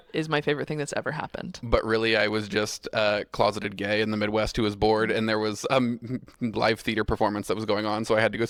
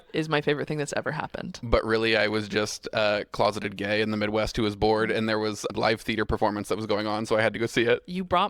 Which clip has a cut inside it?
second; 1 cut; at 5.7 s

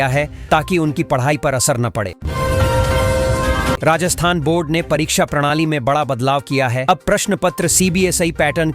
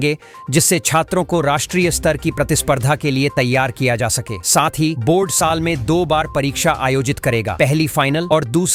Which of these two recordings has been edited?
first; 2 cuts; at 2.2 s, 3.8 s

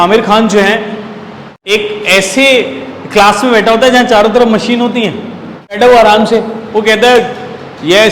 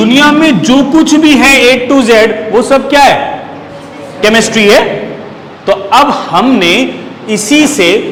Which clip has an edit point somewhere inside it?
first; 2 cuts; at 1.5 s, 5.8 s

